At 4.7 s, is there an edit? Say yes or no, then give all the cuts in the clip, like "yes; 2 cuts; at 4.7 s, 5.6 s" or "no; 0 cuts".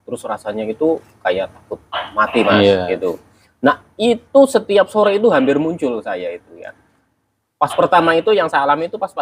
no; 0 cuts